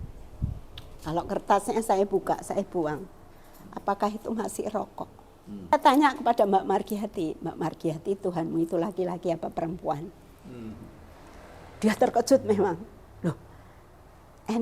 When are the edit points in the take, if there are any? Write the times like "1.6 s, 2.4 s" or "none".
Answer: 5.7 s